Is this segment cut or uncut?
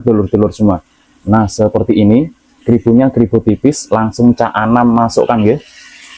uncut